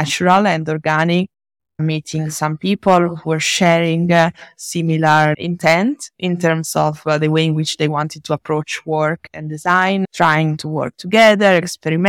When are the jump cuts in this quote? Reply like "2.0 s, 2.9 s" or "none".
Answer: none